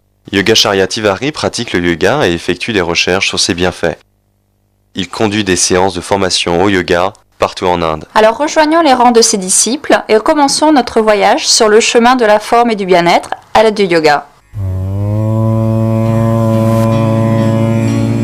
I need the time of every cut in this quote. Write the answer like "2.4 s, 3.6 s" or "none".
none